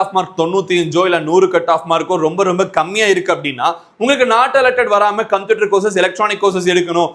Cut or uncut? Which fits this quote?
uncut